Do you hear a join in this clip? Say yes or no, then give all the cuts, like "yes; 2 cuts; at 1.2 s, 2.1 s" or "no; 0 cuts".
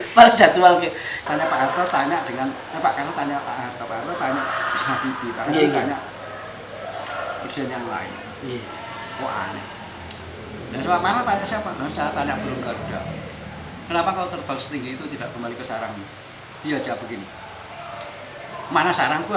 yes; 1 cut; at 1.2 s